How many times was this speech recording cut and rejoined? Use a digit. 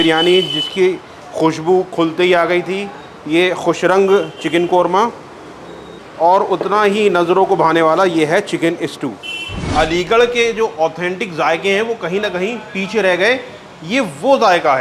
1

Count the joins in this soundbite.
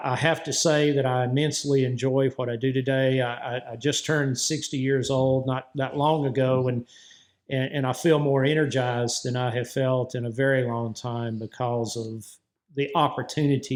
0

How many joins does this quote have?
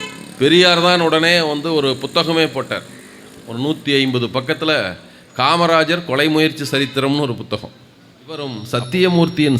1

